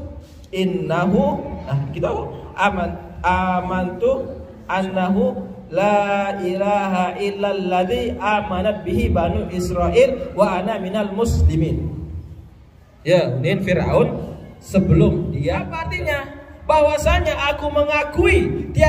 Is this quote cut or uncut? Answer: cut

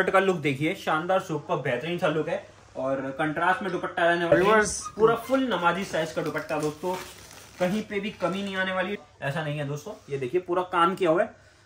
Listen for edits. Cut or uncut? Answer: cut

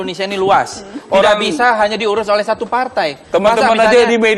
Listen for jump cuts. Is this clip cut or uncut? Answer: uncut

